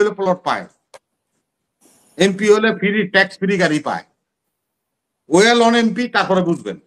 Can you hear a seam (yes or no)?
no